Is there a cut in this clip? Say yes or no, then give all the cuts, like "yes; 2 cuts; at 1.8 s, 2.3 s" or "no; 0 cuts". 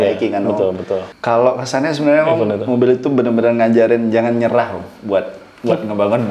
yes; 1 cut; at 1.1 s